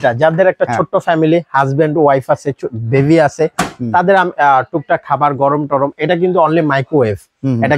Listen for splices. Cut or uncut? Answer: uncut